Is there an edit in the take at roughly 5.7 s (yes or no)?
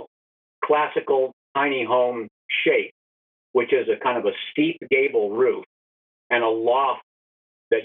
no